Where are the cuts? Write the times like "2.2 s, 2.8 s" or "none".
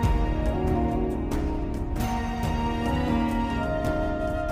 1.7 s